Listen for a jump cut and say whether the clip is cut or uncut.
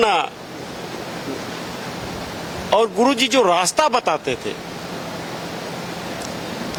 uncut